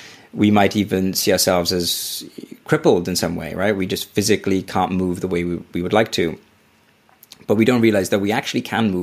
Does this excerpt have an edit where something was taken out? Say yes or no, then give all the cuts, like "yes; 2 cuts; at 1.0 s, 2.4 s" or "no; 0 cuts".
no; 0 cuts